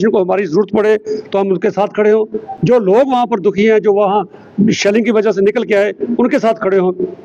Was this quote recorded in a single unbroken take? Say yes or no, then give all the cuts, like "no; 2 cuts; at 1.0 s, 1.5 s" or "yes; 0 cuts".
yes; 0 cuts